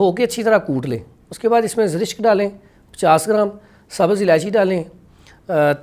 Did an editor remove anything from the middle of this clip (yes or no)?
no